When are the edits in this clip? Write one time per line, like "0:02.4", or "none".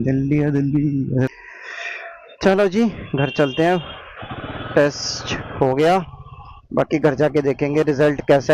0:01.3